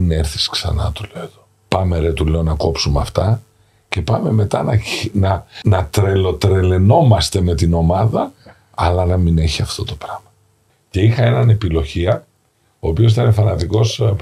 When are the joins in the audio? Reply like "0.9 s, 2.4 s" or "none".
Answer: 1.5 s, 5.5 s, 10.3 s